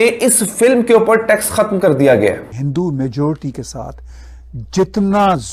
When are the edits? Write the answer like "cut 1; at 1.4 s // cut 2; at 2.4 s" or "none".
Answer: cut 1; at 2.6 s